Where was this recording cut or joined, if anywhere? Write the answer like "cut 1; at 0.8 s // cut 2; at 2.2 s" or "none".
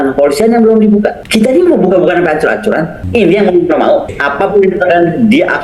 cut 1; at 1.2 s // cut 2; at 3.0 s // cut 3; at 4.2 s

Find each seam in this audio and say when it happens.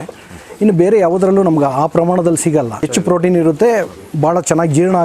cut 1; at 2.8 s

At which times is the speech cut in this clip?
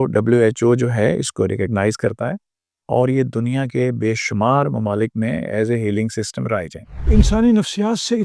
cut 1; at 7.1 s

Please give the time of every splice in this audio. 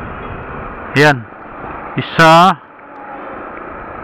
cut 1; at 2.7 s

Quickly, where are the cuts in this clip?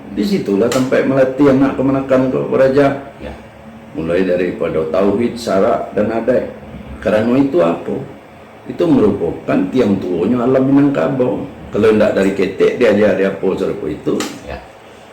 none

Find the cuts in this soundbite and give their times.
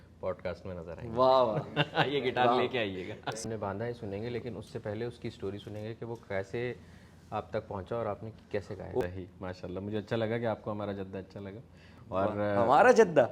cut 1; at 3.4 s // cut 2; at 9.0 s

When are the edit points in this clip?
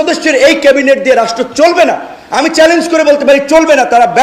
none

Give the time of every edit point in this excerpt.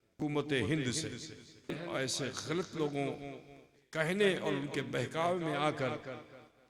cut 1; at 1.8 s // cut 2; at 4.2 s

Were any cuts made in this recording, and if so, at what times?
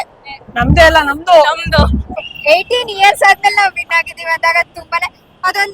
cut 1; at 2.1 s

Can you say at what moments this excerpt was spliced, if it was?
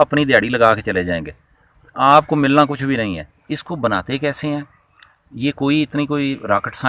cut 1; at 3.4 s

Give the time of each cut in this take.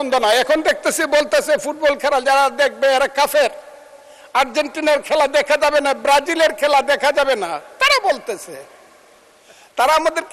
none

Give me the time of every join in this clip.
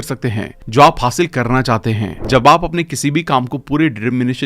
cut 1; at 2.1 s

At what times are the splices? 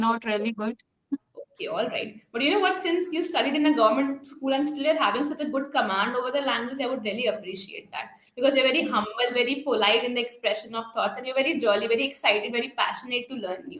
none

